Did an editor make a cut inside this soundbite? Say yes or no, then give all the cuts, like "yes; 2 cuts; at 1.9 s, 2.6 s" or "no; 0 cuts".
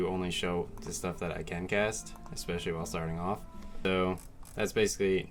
yes; 1 cut; at 3.9 s